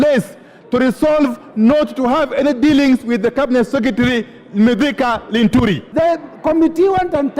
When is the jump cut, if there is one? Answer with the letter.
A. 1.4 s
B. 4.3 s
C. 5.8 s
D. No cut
C